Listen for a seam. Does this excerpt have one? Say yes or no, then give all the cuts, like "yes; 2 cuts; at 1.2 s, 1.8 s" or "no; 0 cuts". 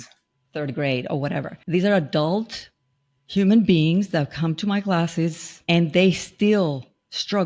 yes; 1 cut; at 5.5 s